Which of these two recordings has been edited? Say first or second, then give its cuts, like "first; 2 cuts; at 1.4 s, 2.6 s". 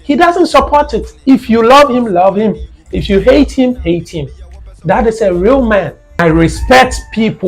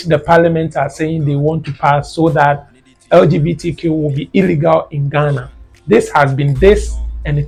first; 1 cut; at 6.2 s